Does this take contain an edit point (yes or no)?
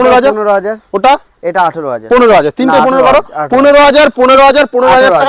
no